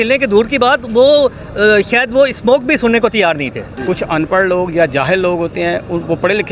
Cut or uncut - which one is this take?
cut